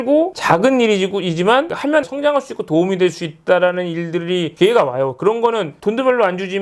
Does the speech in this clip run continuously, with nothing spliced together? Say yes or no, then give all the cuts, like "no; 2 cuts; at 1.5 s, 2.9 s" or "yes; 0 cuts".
yes; 0 cuts